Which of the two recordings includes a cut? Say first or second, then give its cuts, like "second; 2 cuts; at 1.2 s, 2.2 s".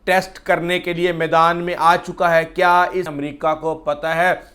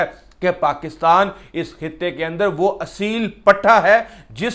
first; 1 cut; at 3.1 s